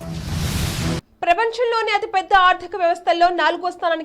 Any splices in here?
yes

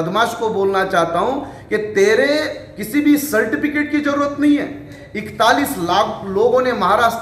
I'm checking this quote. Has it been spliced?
yes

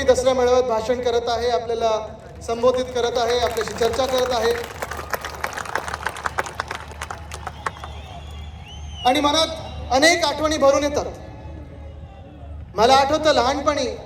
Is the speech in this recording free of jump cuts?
yes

